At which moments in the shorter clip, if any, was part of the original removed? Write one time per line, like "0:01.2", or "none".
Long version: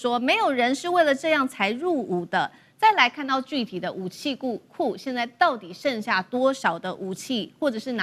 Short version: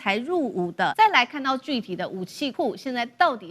0:00.9
0:02.5